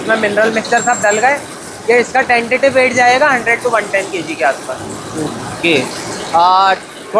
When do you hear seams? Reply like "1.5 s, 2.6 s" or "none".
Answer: none